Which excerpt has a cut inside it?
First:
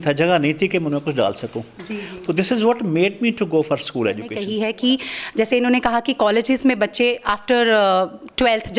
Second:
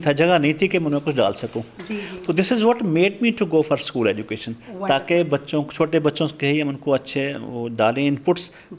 first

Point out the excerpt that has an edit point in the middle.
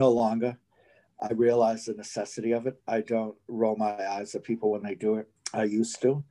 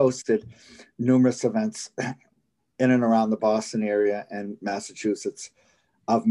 first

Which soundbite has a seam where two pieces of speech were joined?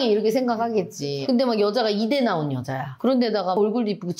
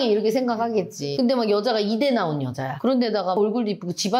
second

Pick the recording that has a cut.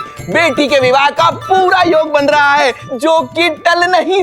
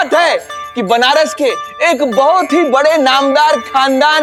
first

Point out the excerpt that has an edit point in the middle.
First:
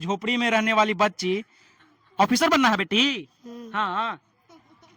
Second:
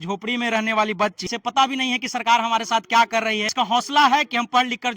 second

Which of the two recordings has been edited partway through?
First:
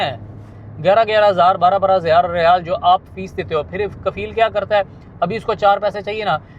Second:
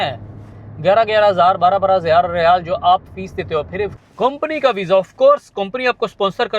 second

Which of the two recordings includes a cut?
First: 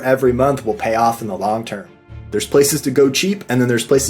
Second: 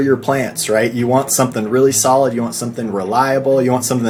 first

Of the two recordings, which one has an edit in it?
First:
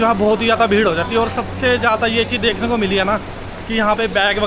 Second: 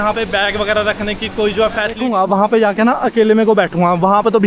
second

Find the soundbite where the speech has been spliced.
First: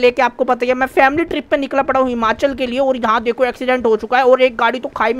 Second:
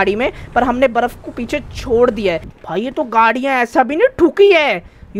second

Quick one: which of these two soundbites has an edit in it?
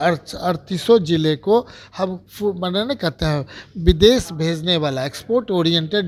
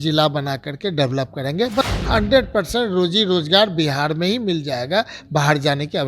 second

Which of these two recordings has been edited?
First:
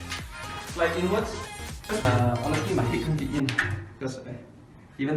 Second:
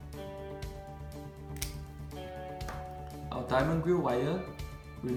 first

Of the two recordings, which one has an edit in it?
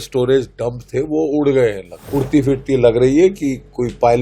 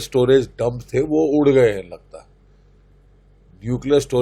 first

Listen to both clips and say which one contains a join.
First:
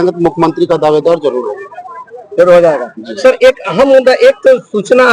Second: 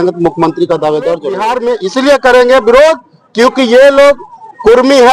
second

